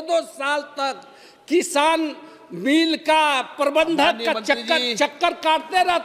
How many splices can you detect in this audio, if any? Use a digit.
0